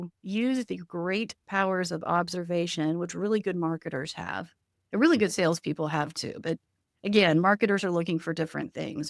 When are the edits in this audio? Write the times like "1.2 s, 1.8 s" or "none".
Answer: none